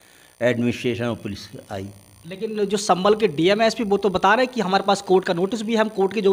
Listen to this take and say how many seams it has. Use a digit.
0